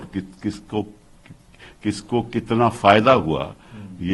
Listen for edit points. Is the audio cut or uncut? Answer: uncut